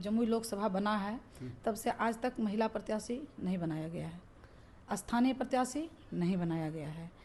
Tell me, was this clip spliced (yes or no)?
no